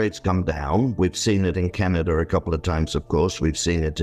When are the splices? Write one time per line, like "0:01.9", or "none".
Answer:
none